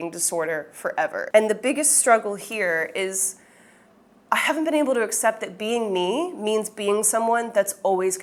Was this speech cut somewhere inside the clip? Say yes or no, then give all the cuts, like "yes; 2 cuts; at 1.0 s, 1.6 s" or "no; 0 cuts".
no; 0 cuts